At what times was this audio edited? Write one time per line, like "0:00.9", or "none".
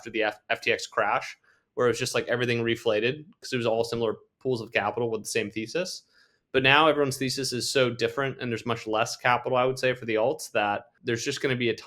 0:10.9